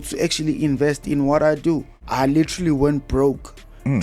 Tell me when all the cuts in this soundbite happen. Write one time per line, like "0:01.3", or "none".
0:02.0